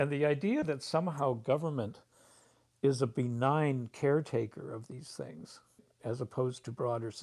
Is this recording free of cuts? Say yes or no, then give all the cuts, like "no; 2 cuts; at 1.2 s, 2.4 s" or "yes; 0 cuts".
no; 1 cut; at 5.9 s